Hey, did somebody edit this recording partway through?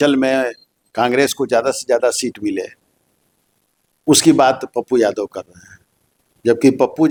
no; 0 cuts

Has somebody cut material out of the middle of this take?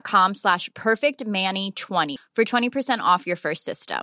yes; 1 cut; at 2.2 s

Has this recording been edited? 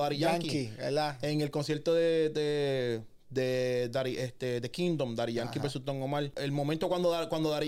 yes; 1 cut; at 6.4 s

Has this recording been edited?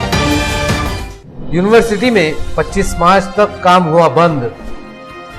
no; 0 cuts

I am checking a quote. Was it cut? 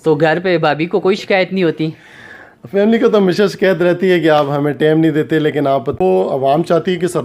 yes; 1 cut; at 6.0 s

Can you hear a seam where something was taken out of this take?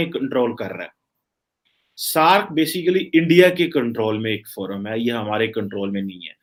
no; 0 cuts

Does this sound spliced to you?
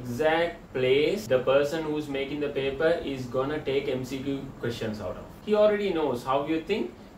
yes; 2 cuts; at 1.2 s, 5.3 s

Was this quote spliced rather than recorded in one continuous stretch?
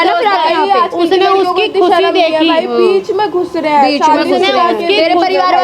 no; 0 cuts

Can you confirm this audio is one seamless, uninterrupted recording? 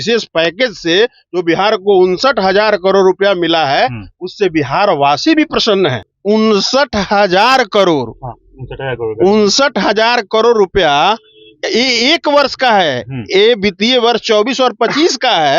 no; 1 cut; at 6.1 s

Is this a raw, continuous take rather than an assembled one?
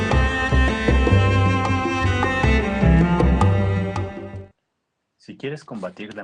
yes; 0 cuts

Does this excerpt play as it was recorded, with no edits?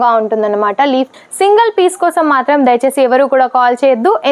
no; 1 cut; at 1.1 s

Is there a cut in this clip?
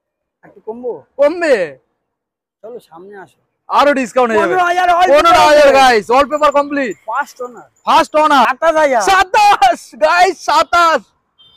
yes; 1 cut; at 8.5 s

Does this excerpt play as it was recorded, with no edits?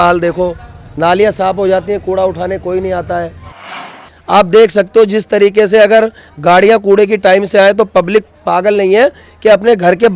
no; 1 cut; at 3.9 s

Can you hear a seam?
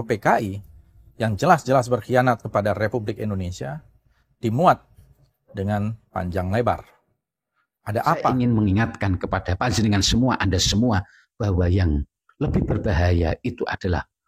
yes; 1 cut; at 8.2 s

